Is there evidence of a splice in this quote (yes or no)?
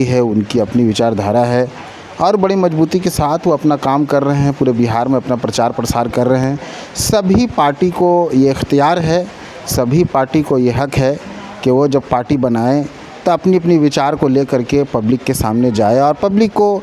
no